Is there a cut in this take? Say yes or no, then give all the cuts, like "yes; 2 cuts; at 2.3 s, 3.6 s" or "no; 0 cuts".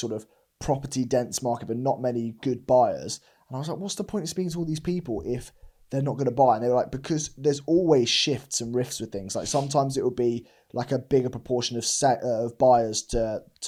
no; 0 cuts